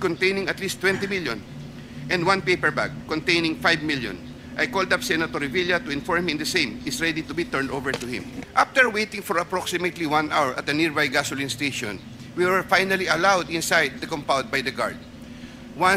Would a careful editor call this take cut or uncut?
cut